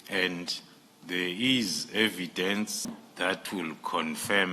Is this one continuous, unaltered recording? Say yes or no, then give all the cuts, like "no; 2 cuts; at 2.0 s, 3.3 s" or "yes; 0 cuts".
no; 1 cut; at 3.0 s